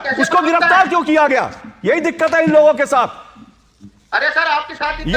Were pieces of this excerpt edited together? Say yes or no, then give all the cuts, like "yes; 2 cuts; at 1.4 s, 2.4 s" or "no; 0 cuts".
no; 0 cuts